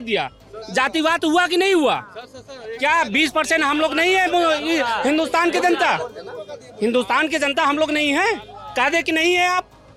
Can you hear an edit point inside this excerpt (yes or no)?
no